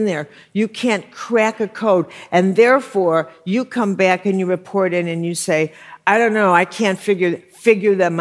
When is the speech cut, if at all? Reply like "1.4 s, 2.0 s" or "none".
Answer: none